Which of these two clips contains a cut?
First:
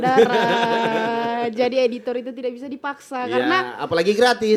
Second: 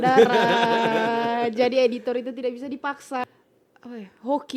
second; 1 cut; at 3.2 s

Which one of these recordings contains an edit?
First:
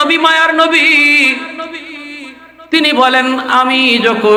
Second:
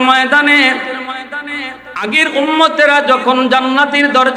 second; 1 cut; at 2.0 s

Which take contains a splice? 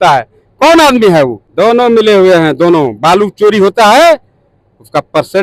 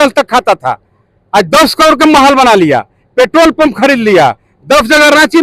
first; 1 cut; at 1.4 s

